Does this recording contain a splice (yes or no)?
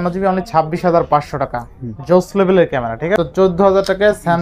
yes